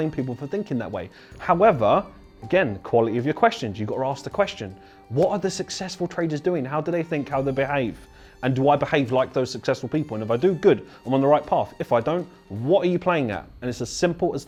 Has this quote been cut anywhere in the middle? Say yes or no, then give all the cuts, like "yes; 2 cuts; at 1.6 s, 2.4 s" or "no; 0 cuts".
no; 0 cuts